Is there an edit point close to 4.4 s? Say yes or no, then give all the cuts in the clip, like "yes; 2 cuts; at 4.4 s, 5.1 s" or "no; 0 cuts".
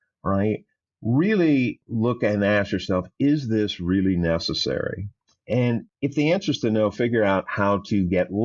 no; 2 cuts; at 1.8 s, 5.9 s